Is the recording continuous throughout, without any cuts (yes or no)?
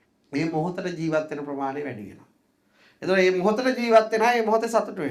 yes